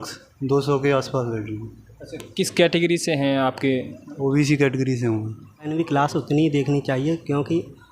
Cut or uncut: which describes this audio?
cut